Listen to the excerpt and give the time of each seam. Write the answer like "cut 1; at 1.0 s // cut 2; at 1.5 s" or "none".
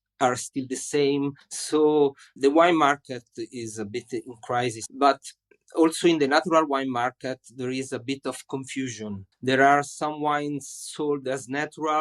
cut 1; at 4.9 s // cut 2; at 9.3 s